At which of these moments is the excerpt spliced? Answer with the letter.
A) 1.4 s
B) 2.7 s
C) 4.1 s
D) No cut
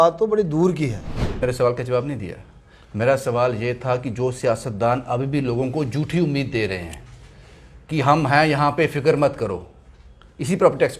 A